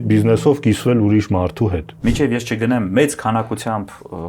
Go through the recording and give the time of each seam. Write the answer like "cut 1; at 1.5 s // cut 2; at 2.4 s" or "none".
cut 1; at 1.9 s